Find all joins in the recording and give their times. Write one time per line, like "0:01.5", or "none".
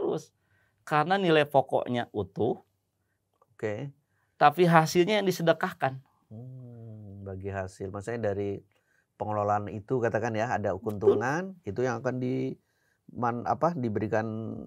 none